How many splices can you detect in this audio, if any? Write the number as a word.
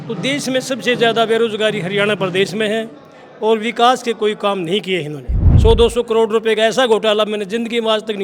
one